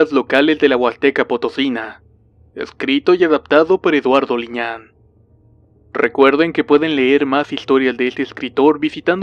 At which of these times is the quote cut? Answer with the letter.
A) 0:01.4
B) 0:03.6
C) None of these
C